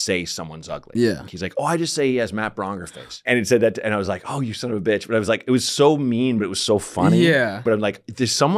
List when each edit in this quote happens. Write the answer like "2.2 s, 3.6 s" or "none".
1.3 s, 3.2 s, 7.6 s